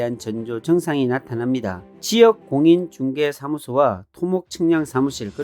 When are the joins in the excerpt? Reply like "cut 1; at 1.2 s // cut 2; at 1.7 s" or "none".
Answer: cut 1; at 1.8 s